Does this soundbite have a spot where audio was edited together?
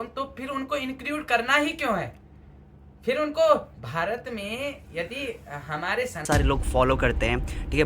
yes; 1 cut; at 6.2 s

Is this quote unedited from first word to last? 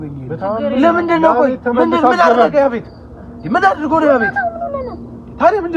yes; 0 cuts

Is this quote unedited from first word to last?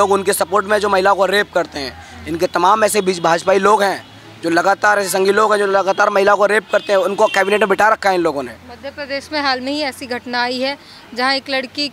yes; 0 cuts

